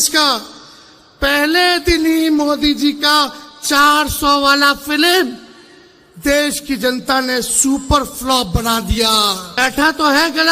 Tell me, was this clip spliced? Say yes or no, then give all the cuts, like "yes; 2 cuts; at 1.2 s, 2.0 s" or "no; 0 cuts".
yes; 1 cut; at 9.5 s